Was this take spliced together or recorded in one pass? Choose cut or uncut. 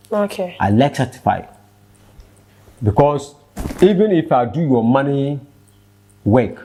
uncut